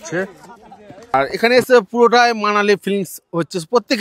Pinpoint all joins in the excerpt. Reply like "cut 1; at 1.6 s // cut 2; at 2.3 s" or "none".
cut 1; at 1.1 s